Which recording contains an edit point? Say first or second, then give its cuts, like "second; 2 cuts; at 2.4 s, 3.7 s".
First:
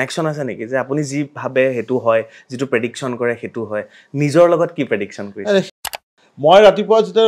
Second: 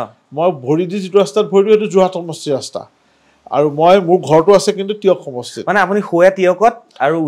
first; 1 cut; at 5.9 s